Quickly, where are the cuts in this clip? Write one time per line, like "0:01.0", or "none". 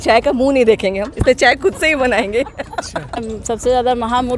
0:03.3